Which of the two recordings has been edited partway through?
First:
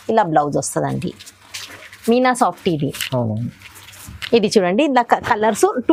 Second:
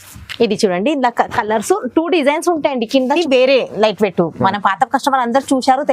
second; 1 cut; at 3.1 s

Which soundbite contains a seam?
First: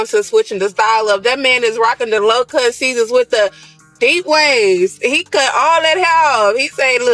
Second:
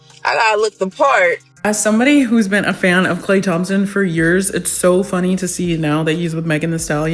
second; 1 cut; at 1.5 s

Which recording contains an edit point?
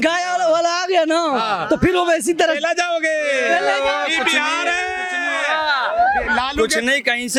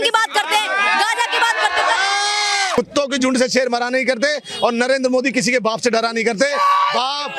second; 1 cut; at 2.7 s

